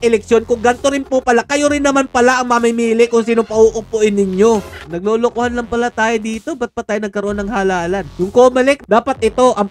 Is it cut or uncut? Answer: cut